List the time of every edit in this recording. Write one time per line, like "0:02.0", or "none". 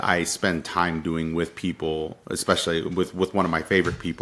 0:02.2